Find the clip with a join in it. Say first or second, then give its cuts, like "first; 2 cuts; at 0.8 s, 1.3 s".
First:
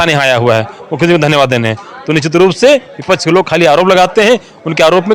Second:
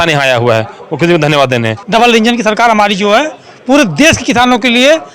second; 1 cut; at 1.8 s